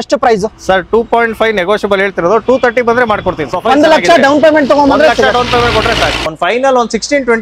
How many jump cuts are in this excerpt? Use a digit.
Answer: 2